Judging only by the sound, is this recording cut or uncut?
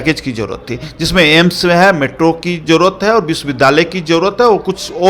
uncut